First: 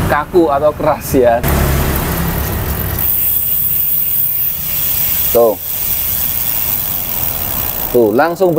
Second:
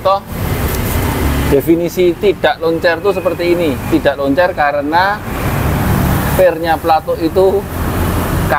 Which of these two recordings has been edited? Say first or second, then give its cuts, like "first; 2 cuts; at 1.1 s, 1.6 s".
first; 1 cut; at 1.4 s